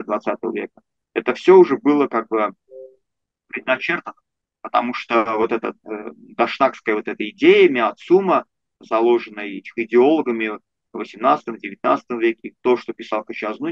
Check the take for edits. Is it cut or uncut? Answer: uncut